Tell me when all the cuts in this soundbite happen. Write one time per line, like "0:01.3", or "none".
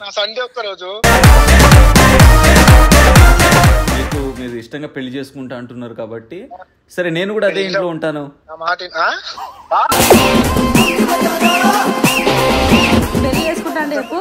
0:03.9
0:13.3